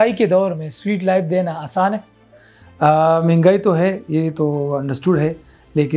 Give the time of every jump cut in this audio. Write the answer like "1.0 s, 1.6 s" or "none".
none